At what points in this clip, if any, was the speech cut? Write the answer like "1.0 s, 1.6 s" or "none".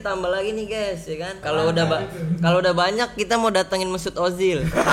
1.4 s